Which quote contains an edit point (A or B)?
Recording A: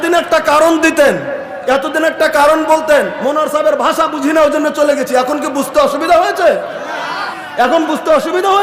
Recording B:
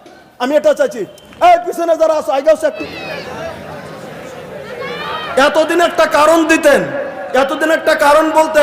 B